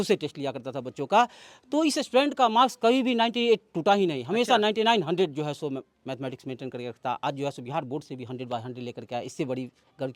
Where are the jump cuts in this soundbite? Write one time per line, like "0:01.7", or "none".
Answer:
none